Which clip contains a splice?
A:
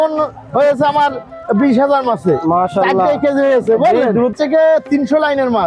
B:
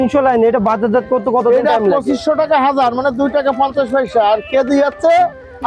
A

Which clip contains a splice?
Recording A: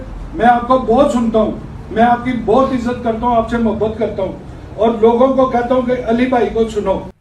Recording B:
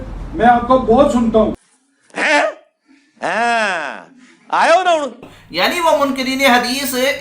B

